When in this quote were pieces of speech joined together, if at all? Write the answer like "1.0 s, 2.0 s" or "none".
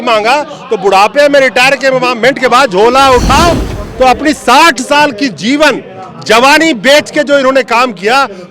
3.8 s